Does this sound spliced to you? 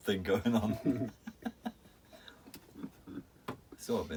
no; 0 cuts

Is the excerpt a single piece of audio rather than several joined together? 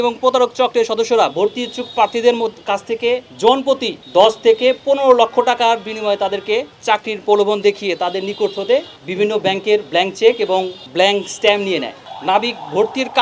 no; 6 cuts; at 3.3 s, 3.9 s, 6.7 s, 9.0 s, 10.8 s, 12.0 s

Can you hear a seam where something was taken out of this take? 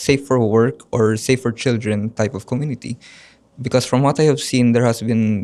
no; 0 cuts

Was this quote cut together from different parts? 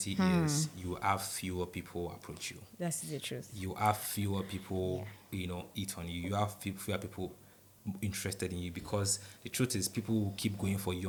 no; 0 cuts

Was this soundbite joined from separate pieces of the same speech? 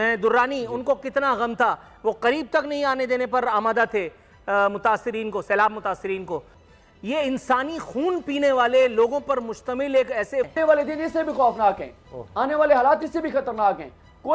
yes; 2 cuts; at 6.5 s, 10.5 s

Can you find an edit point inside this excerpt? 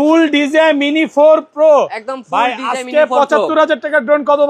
no; 0 cuts

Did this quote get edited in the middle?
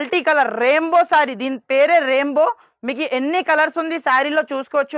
no; 0 cuts

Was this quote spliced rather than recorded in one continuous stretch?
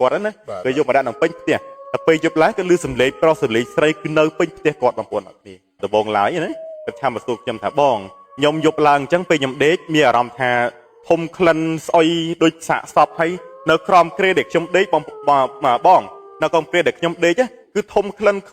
yes; 1 cut; at 5.8 s

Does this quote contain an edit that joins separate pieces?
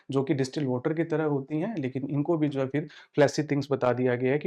no; 0 cuts

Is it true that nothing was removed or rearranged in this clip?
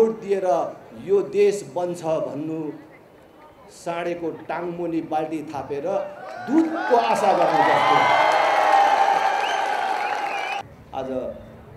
no; 1 cut; at 10.6 s

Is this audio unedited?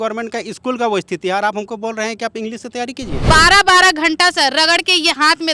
no; 1 cut; at 3.2 s

